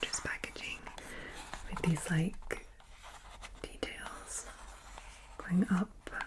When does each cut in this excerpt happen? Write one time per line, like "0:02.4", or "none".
none